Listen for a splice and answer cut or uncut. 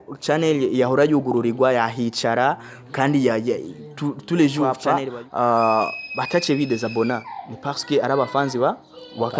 cut